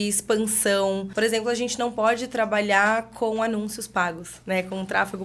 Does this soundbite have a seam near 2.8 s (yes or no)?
no